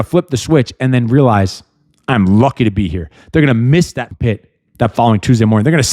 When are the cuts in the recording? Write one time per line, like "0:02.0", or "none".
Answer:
0:04.0